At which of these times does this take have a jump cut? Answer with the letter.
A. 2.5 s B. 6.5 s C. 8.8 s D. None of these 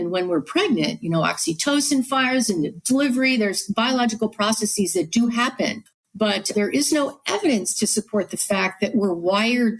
B